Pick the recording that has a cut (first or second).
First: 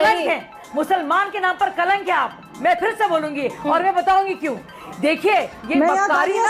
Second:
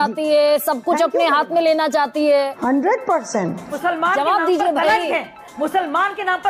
second